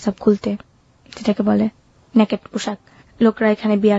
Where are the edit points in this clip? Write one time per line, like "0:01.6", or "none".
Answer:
none

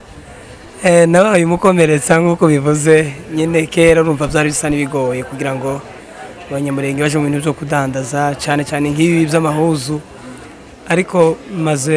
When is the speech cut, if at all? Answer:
none

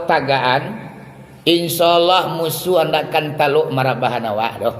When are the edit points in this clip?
none

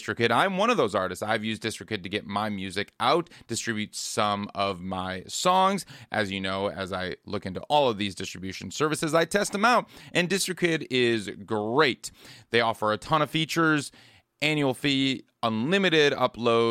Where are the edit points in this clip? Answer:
none

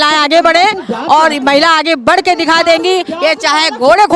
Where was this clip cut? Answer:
none

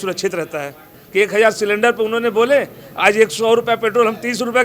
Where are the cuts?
0:01.0

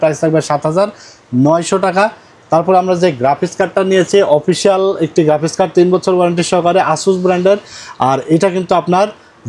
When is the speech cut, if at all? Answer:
none

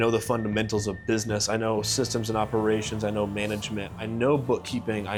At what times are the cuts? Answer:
none

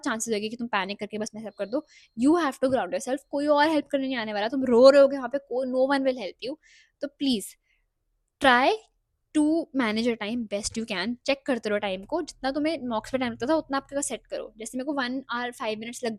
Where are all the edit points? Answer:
none

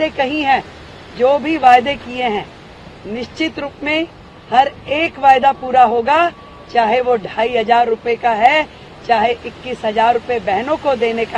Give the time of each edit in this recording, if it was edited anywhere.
none

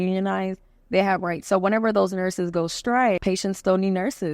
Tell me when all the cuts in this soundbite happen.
0:03.2

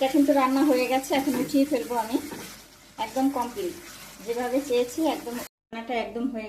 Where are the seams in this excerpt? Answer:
0:05.5

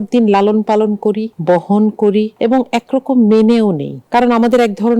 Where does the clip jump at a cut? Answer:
0:01.3
0:02.3
0:03.9

